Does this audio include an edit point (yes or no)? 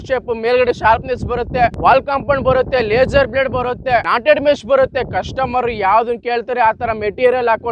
yes